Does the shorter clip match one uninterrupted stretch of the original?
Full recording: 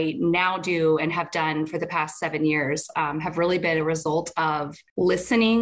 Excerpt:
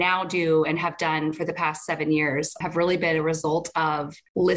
no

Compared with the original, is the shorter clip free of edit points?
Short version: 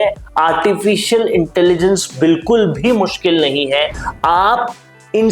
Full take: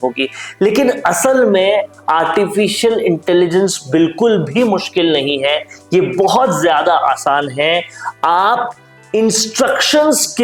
no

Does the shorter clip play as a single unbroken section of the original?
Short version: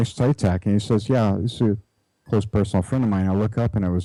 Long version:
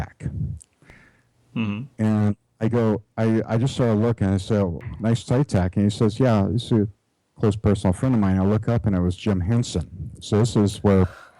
yes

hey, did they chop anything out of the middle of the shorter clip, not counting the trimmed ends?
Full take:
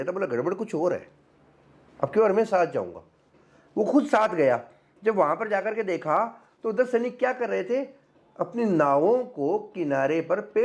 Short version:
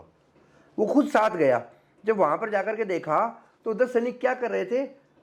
no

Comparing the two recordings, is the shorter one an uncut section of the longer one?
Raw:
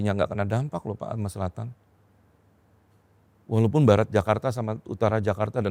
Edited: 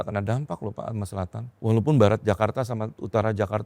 no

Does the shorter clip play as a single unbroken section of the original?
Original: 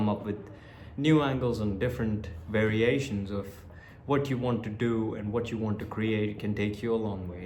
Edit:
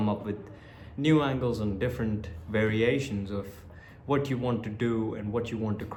yes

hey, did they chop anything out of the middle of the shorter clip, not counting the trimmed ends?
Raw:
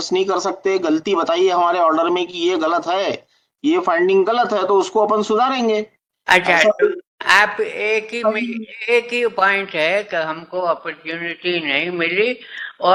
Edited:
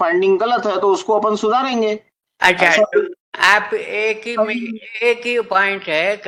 no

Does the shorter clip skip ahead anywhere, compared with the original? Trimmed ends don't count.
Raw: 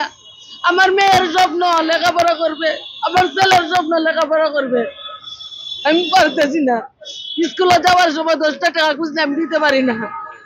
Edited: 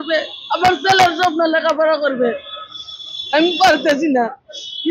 no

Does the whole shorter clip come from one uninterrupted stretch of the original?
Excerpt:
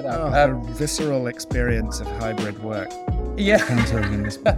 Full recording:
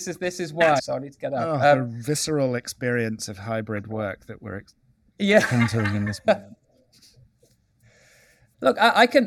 no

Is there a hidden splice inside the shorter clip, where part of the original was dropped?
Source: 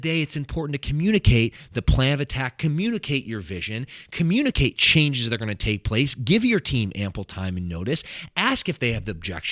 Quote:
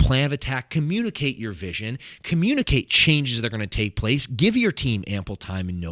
no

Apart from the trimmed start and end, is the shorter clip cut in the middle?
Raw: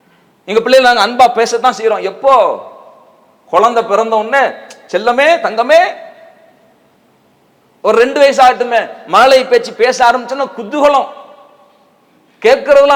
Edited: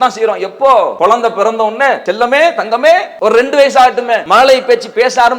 yes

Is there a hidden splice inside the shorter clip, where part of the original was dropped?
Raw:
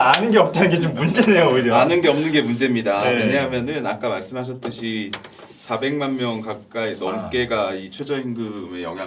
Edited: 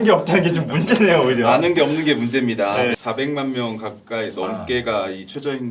yes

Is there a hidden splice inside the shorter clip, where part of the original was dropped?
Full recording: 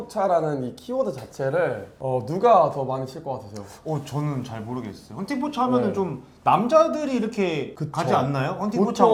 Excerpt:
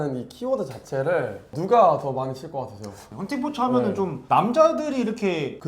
yes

